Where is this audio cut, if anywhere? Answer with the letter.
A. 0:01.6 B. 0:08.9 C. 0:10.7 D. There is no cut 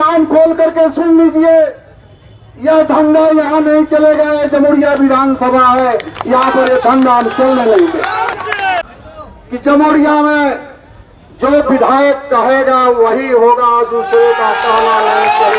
B